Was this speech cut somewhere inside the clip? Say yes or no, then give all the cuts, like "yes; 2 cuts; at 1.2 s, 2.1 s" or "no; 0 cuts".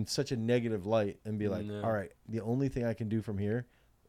no; 0 cuts